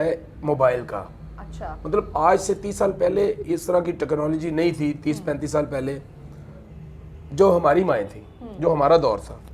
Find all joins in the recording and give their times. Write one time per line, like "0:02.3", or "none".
none